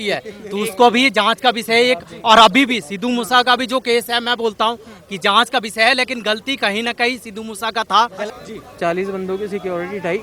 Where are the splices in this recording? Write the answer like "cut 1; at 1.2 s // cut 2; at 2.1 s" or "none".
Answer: cut 1; at 8.3 s